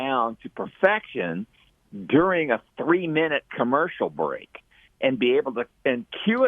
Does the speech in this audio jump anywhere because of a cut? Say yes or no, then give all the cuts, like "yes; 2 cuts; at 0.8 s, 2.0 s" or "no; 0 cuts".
no; 0 cuts